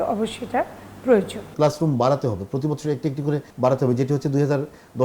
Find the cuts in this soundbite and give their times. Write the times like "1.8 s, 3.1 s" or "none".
1.5 s, 3.5 s

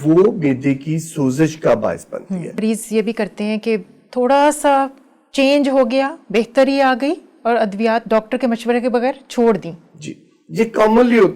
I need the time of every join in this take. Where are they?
2.6 s

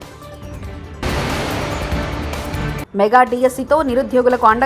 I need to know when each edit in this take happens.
1.0 s, 2.7 s

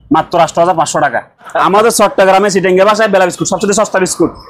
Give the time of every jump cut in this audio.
1.5 s

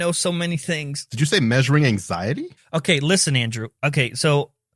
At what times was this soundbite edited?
1.0 s

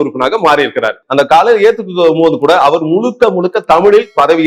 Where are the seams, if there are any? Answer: 1.0 s

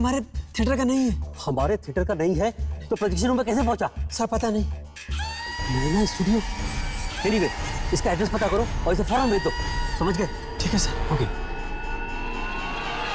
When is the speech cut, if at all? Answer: none

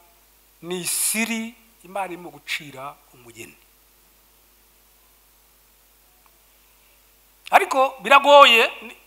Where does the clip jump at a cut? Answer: none

